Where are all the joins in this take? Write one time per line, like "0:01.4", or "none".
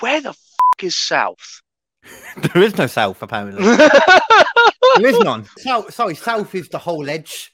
0:05.5